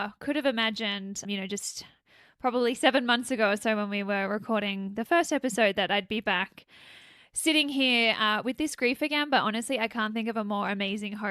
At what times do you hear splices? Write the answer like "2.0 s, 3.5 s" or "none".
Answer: 1.2 s